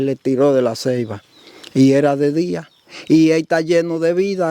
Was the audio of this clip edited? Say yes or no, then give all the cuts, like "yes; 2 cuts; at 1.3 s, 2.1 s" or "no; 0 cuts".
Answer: no; 0 cuts